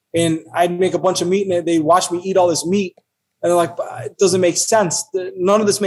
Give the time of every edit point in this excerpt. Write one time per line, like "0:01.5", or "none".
none